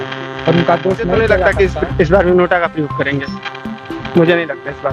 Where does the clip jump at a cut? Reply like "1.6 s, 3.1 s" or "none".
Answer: 1.3 s

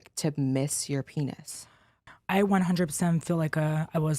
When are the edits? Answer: 2.0 s

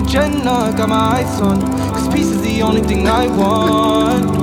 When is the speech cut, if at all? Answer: none

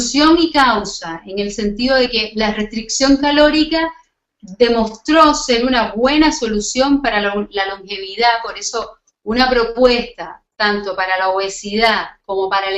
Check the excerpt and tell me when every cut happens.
9.0 s

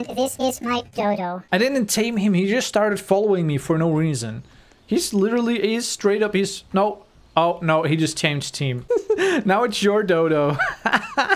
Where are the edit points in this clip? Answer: none

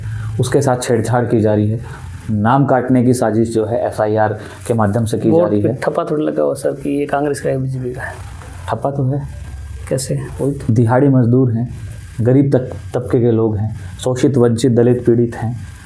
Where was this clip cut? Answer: none

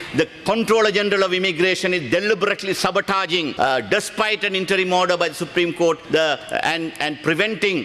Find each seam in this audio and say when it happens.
3.5 s

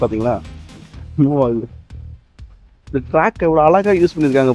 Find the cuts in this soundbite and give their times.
none

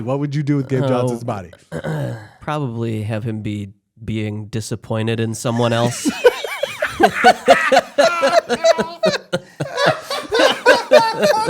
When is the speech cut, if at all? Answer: 2.3 s

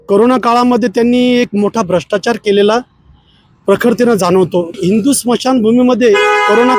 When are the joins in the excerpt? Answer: 4.8 s

